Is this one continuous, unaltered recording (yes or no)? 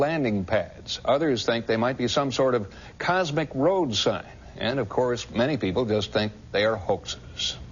no